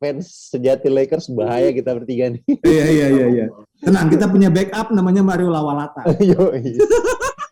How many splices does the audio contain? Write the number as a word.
zero